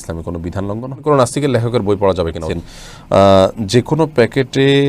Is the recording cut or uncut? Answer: cut